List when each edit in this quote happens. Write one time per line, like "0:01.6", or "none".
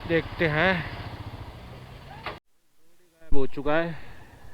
0:02.4